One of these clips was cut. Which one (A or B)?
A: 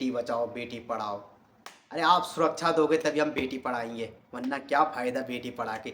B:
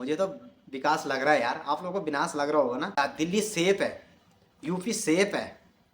B